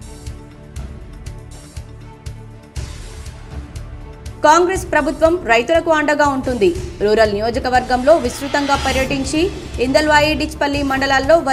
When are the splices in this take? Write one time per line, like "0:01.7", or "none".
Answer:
none